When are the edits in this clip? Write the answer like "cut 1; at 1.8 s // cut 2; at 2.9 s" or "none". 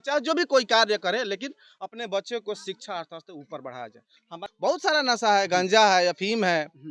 cut 1; at 4.5 s